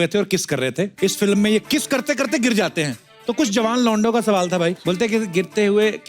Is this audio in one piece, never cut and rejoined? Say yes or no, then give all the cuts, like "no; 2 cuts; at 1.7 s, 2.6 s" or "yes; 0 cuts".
no; 2 cuts; at 0.9 s, 1.6 s